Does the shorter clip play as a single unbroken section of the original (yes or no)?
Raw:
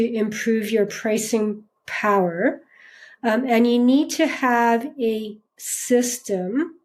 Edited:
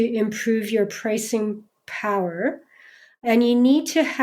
no